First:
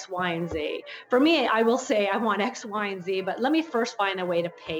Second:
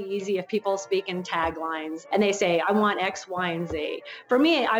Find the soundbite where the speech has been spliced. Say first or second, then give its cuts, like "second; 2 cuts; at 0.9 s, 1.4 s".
second; 1 cut; at 2.0 s